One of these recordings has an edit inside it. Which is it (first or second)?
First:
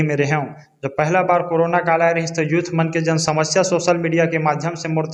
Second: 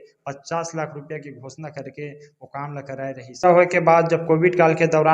second